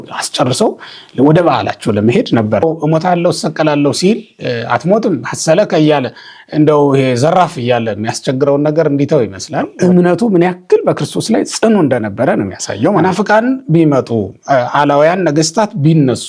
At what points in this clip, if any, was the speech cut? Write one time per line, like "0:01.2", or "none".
0:02.6
0:09.7
0:13.0